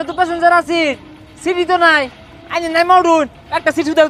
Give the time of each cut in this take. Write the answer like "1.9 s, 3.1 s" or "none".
none